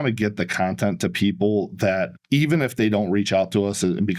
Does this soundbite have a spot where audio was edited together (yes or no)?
yes